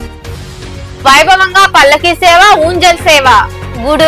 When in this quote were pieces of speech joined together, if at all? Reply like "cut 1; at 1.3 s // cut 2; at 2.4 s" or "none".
cut 1; at 1.0 s